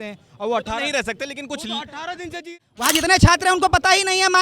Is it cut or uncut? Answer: cut